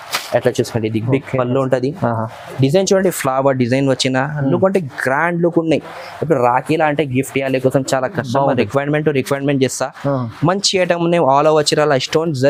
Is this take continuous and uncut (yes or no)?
yes